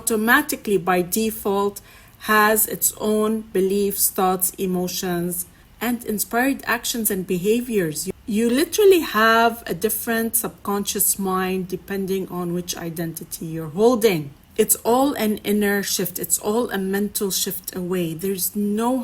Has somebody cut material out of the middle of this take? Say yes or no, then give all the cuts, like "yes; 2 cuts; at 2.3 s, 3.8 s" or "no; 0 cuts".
yes; 2 cuts; at 8.0 s, 14.4 s